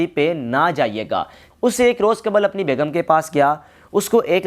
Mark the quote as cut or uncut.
cut